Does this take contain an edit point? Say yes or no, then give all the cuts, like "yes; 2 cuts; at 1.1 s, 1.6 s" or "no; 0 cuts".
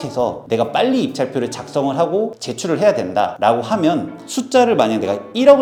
no; 0 cuts